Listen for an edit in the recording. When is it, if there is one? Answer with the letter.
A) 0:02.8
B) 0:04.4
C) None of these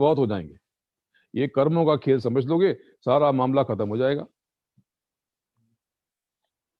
C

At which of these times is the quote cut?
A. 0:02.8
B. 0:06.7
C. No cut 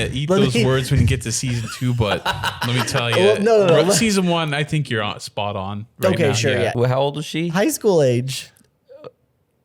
B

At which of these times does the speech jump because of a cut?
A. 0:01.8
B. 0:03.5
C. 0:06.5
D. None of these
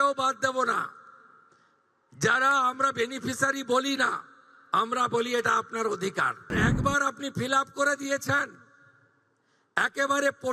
C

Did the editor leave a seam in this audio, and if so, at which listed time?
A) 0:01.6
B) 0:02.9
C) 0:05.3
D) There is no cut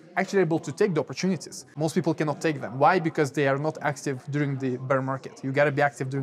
A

